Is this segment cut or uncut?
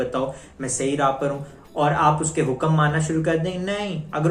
uncut